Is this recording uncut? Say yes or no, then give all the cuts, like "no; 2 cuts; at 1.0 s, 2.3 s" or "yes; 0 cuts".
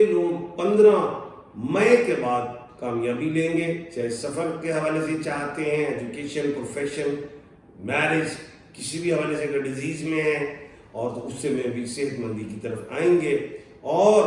yes; 0 cuts